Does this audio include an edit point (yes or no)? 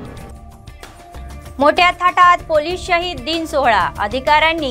yes